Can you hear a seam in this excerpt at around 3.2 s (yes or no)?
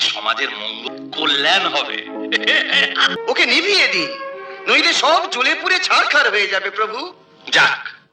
yes